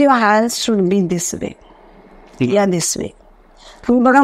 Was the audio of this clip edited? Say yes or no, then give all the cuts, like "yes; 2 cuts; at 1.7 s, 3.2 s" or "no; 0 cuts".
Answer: no; 0 cuts